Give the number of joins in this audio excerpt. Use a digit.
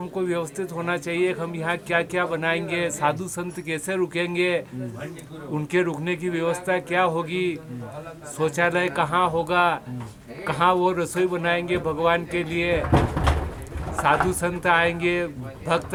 0